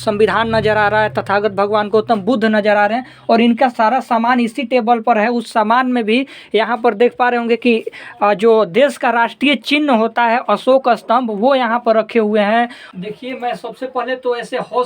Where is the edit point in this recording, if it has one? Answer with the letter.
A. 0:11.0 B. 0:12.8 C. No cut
B